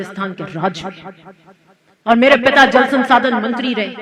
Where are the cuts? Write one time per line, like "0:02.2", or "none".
none